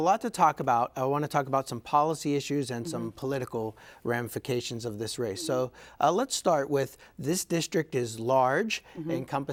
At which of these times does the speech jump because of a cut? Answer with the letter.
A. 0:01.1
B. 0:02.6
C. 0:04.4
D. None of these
D